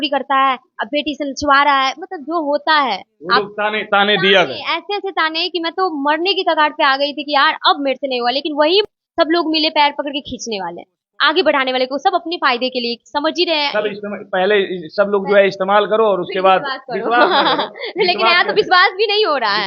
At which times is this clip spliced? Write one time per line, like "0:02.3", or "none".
0:08.9